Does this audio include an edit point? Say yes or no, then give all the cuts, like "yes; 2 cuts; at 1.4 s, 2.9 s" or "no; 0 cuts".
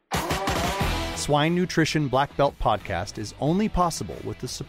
yes; 1 cut; at 1.1 s